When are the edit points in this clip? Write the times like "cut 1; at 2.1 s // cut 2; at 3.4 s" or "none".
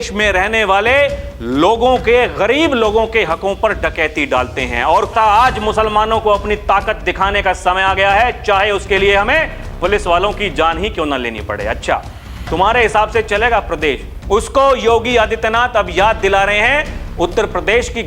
cut 1; at 5.1 s // cut 2; at 14.1 s